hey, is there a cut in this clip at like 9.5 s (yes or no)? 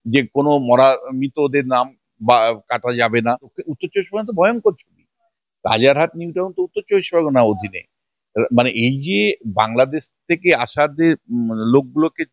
no